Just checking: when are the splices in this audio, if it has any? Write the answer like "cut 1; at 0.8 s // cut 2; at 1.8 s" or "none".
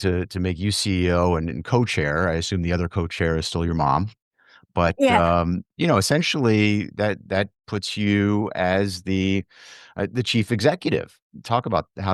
cut 1; at 5.7 s // cut 2; at 11.2 s